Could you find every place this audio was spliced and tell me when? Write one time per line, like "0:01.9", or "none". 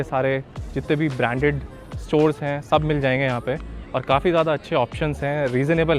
none